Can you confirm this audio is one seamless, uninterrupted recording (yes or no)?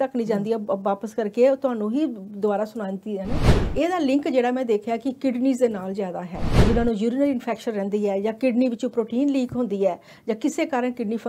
no